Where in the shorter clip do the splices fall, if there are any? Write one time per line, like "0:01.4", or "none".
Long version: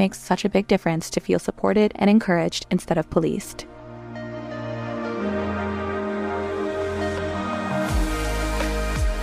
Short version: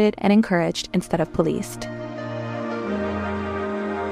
0:01.8